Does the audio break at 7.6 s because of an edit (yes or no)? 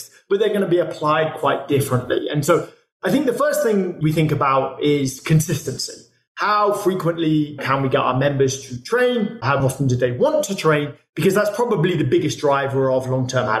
yes